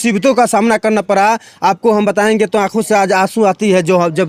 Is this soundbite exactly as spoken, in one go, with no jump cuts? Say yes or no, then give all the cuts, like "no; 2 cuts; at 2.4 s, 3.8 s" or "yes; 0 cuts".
yes; 0 cuts